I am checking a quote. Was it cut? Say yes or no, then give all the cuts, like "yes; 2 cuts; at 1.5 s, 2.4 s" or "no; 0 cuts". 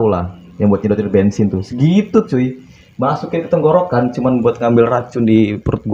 no; 0 cuts